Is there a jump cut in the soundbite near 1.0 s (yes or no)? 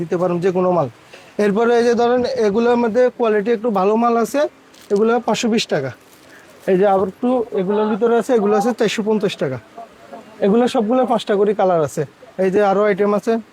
no